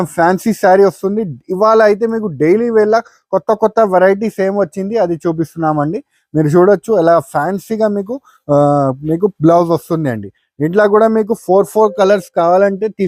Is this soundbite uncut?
yes; 0 cuts

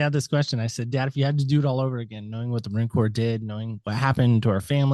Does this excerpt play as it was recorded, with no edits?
yes; 0 cuts

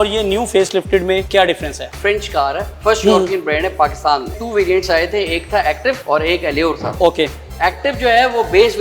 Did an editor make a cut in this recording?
yes; 4 cuts; at 1.5 s, 4.3 s, 6.0 s, 6.9 s

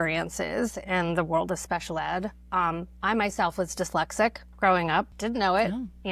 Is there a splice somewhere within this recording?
yes; 1 cut; at 5.1 s

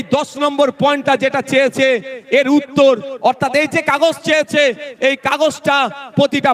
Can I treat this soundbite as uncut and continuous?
yes; 0 cuts

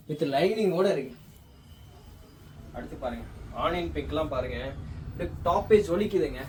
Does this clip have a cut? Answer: no; 0 cuts

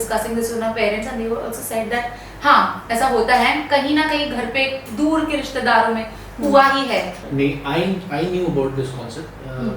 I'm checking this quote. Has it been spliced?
yes; 1 cut; at 7.2 s

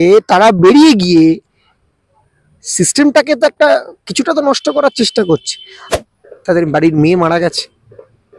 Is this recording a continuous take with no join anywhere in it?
no; 1 cut; at 5.8 s

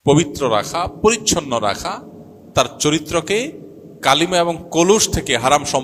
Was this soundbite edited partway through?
no; 0 cuts

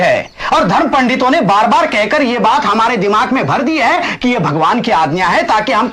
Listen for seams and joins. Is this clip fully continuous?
yes; 0 cuts

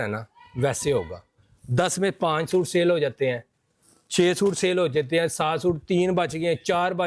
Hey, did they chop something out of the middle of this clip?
no; 0 cuts

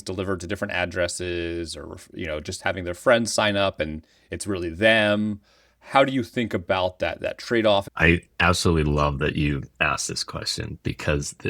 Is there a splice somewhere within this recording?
yes; 1 cut; at 7.9 s

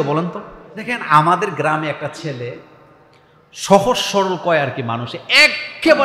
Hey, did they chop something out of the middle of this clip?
yes; 1 cut; at 0.9 s

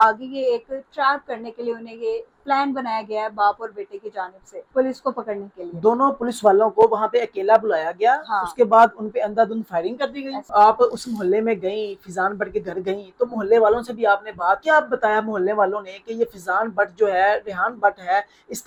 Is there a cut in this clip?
no; 0 cuts

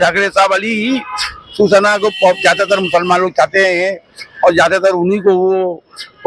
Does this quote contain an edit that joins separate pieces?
no; 0 cuts

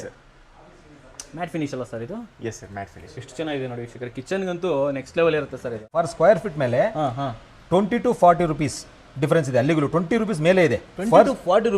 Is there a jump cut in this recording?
yes; 1 cut; at 6.1 s

